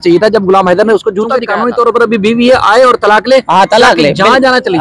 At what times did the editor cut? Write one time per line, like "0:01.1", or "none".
0:01.4